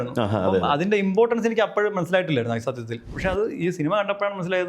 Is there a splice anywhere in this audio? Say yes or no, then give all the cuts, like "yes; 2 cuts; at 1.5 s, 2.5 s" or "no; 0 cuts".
yes; 1 cut; at 3.1 s